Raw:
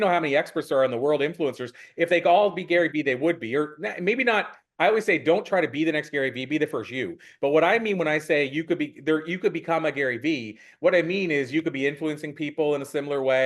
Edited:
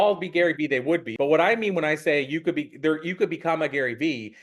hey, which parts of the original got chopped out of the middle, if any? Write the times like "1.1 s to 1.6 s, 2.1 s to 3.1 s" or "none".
3.4 s to 7.3 s